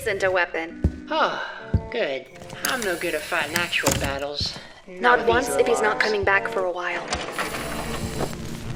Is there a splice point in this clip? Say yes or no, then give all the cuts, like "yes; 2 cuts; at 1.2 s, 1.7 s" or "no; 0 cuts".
no; 0 cuts